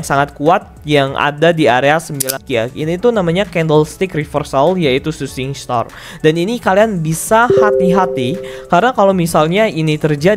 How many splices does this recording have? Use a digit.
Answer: 1